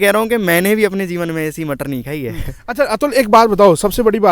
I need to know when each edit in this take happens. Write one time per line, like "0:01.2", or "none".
none